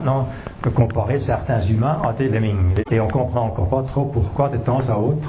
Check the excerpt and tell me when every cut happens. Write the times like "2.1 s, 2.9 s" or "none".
2.7 s